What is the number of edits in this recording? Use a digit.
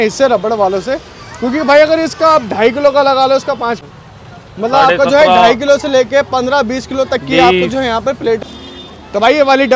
2